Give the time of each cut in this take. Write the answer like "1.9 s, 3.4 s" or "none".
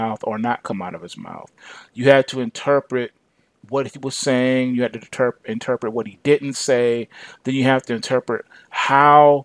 none